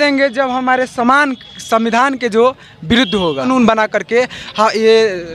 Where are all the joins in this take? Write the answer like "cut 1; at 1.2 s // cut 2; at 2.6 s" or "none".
cut 1; at 3.4 s